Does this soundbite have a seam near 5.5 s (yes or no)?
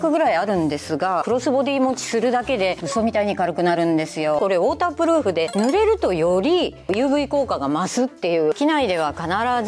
yes